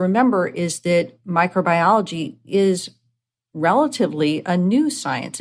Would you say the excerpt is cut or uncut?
uncut